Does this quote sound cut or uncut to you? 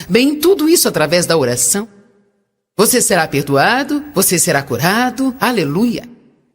cut